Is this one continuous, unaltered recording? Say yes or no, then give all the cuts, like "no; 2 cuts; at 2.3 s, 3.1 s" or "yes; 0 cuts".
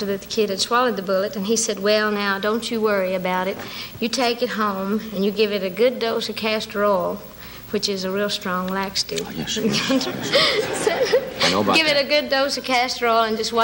yes; 0 cuts